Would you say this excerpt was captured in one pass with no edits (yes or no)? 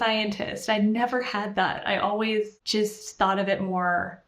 no